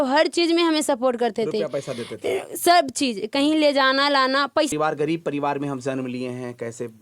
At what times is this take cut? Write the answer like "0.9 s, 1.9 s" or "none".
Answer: 4.7 s

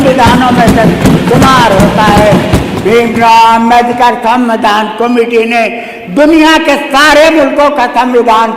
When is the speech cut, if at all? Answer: none

